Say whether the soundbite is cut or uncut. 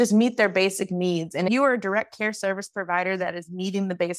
uncut